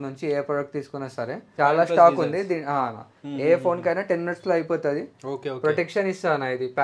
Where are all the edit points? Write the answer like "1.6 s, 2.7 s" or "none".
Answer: 1.6 s

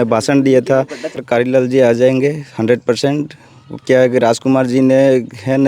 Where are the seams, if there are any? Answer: 1.2 s

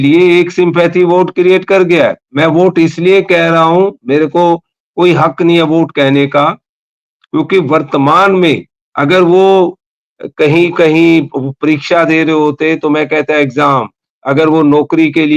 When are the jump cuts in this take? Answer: none

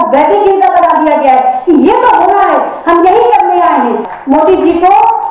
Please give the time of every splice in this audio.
4.1 s

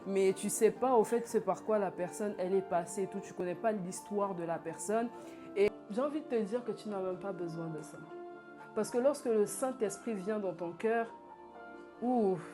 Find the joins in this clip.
5.7 s

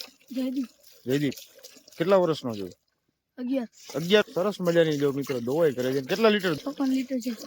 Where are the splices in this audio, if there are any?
4.2 s, 6.6 s

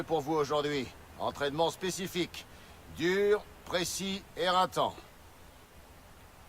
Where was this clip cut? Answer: 2.5 s

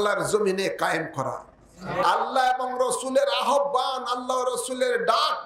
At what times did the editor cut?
2.0 s

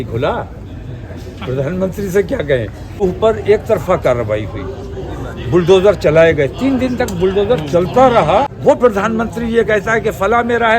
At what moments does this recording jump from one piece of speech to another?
3.0 s, 8.5 s

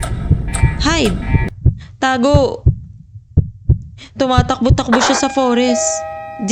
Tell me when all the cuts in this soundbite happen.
none

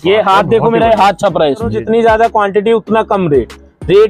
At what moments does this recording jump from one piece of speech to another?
1.7 s

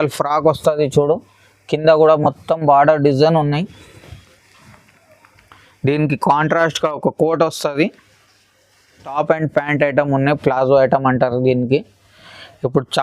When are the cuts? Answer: 9.1 s

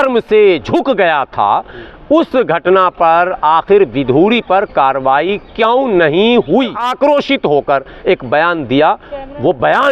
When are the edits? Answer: 6.9 s

